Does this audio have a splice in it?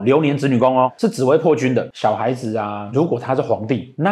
yes; 2 cuts; at 0.9 s, 1.9 s

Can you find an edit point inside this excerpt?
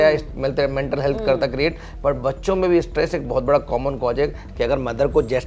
yes; 1 cut; at 4.4 s

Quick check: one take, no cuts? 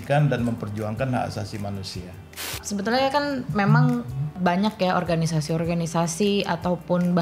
no; 2 cuts; at 2.5 s, 4.4 s

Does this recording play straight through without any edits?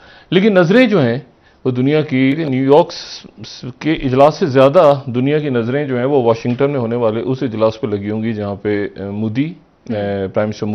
no; 1 cut; at 2.4 s

